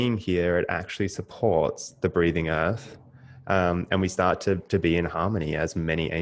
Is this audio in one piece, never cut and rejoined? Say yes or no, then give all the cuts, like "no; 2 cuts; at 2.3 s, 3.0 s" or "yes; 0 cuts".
yes; 0 cuts